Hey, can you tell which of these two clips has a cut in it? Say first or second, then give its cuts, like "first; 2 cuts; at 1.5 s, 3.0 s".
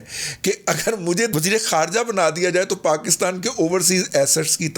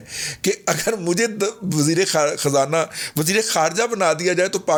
first; 1 cut; at 1.3 s